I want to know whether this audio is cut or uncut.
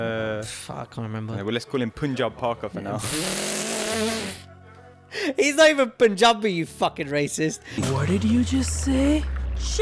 uncut